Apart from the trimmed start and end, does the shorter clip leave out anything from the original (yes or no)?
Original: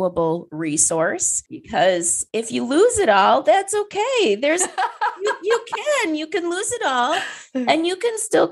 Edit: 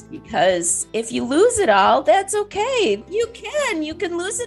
yes